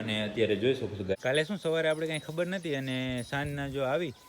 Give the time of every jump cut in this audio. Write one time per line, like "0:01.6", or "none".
0:01.1